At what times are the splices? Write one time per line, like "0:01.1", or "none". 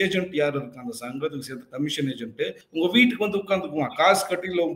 0:02.6